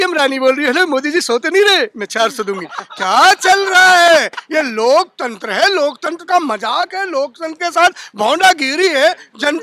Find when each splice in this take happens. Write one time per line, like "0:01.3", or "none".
none